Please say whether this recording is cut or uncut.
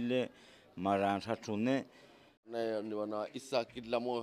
cut